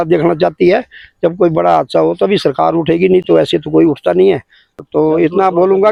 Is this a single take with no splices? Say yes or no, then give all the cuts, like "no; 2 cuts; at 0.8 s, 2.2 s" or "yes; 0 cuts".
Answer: yes; 0 cuts